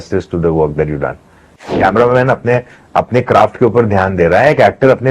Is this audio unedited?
no; 1 cut; at 1.8 s

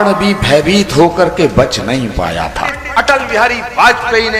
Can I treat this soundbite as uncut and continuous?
no; 1 cut; at 2.8 s

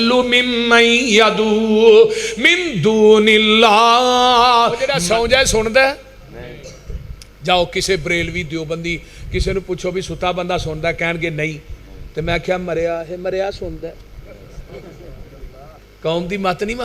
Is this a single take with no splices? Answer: no; 1 cut; at 4.9 s

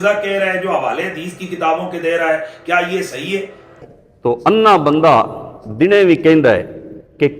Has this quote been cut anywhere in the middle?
yes; 1 cut; at 3.8 s

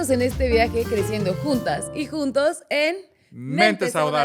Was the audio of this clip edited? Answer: no; 0 cuts

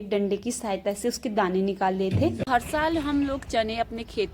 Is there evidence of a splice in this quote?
yes; 1 cut; at 2.4 s

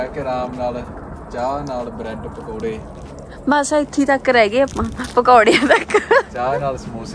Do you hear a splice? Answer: no; 0 cuts

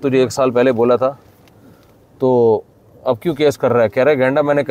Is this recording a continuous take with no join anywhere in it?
yes; 0 cuts

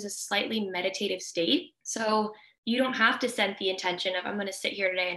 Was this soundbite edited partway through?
yes; 2 cuts; at 1.9 s, 2.5 s

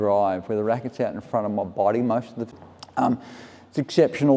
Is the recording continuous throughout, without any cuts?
no; 1 cut; at 2.4 s

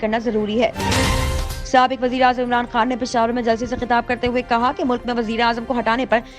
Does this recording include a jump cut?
yes; 1 cut; at 1.0 s

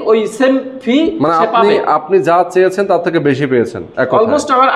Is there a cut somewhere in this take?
no; 0 cuts

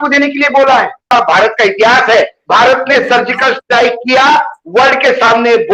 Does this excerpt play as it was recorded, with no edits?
no; 2 cuts; at 1.1 s, 2.4 s

